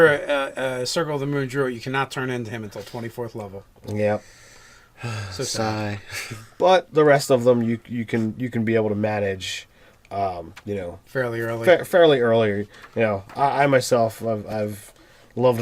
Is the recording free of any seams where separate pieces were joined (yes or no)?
no